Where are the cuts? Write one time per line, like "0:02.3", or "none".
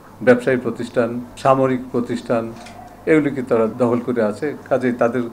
0:01.3
0:03.7